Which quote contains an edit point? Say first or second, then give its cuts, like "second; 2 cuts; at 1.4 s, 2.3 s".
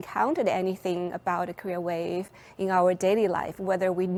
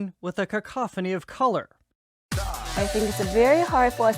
second; 1 cut; at 2.3 s